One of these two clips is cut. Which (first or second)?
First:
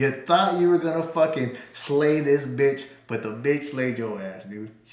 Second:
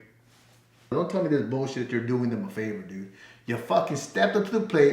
second